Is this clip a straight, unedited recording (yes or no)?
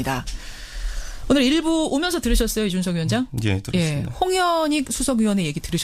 yes